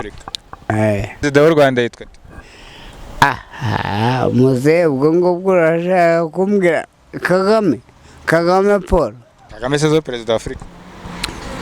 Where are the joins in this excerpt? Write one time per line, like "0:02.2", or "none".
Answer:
0:01.2